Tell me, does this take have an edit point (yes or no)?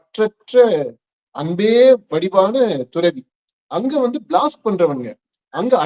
no